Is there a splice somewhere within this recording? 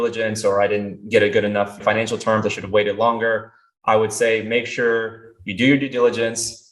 yes; 1 cut; at 1.8 s

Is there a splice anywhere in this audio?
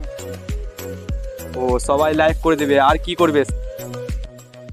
no; 0 cuts

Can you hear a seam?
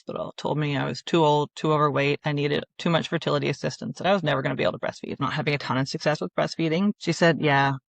yes; 2 cuts; at 5.2 s, 6.9 s

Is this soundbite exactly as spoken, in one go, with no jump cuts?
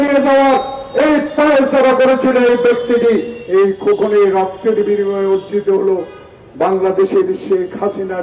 no; 1 cut; at 3.4 s

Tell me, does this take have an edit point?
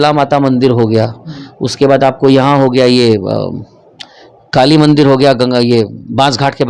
no; 0 cuts

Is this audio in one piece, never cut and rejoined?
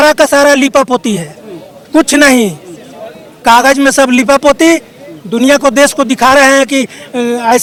yes; 0 cuts

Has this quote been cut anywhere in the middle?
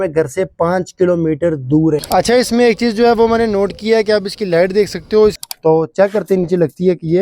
yes; 2 cuts; at 2.0 s, 5.5 s

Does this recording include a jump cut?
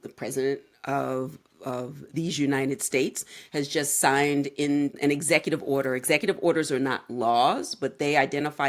yes; 1 cut; at 5.0 s

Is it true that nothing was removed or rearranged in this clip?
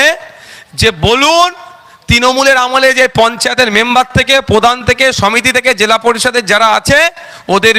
yes; 0 cuts

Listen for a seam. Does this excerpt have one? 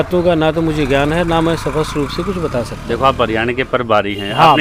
no; 0 cuts

